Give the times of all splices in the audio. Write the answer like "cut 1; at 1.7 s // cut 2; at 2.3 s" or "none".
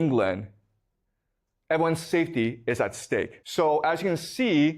cut 1; at 3.4 s